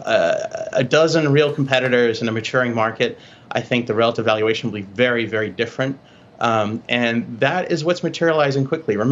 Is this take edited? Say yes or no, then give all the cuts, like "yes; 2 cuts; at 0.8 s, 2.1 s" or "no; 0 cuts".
no; 0 cuts